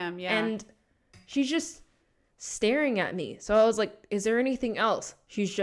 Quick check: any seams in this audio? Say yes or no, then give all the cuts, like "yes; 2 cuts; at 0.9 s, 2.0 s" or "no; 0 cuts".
no; 0 cuts